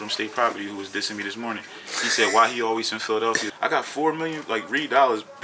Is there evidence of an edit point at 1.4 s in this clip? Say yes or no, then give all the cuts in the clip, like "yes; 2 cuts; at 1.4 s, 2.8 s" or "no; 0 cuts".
no; 1 cut; at 3.5 s